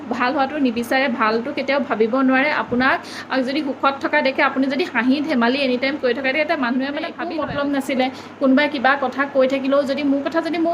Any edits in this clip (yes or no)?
yes